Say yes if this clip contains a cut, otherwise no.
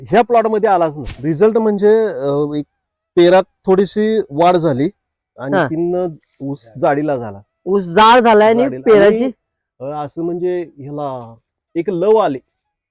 yes